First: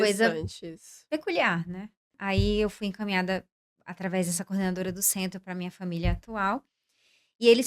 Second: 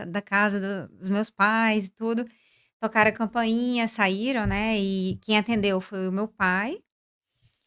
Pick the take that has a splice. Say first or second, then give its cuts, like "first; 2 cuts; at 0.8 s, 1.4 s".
first; 1 cut; at 2.1 s